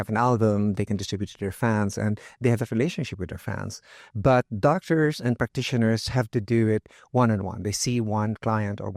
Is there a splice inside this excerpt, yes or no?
no